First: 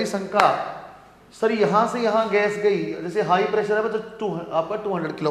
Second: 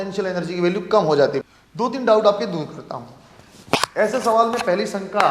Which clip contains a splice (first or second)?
second